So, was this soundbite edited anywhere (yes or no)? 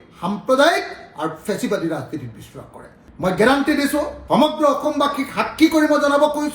yes